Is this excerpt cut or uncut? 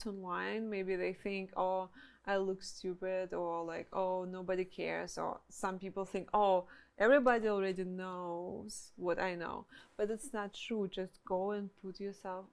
uncut